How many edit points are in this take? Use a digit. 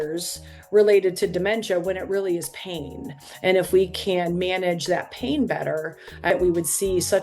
1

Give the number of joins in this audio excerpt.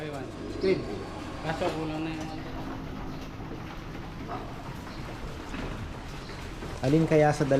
1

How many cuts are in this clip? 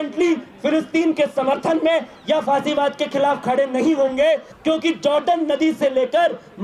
1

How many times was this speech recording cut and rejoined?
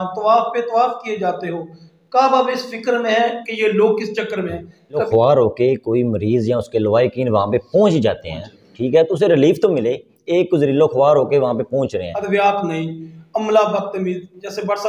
2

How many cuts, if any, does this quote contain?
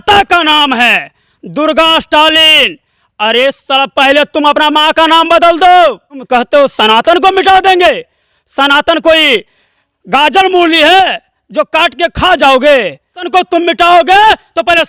2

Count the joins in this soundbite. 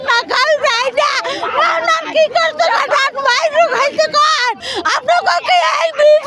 0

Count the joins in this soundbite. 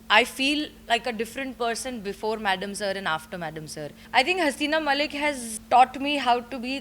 1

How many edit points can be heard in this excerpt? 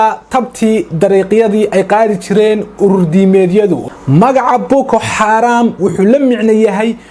1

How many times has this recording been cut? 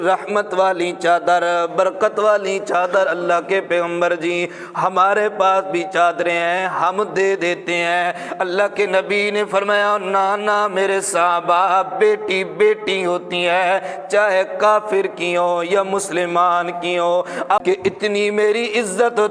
1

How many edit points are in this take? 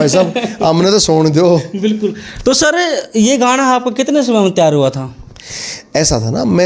0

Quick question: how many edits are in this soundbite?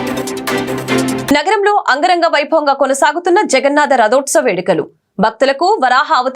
1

